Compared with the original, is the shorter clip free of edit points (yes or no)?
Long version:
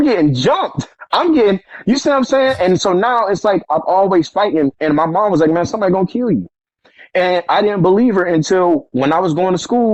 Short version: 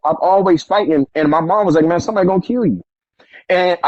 yes